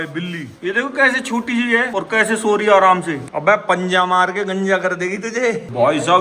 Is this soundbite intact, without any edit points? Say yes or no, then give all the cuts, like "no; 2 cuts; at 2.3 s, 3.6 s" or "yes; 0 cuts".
yes; 0 cuts